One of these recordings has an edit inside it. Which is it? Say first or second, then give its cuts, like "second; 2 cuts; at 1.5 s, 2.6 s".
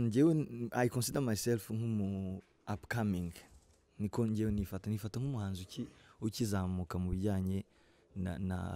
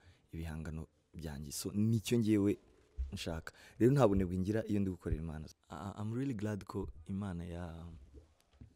second; 1 cut; at 5.6 s